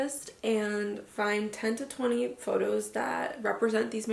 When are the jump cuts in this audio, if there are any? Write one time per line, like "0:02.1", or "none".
none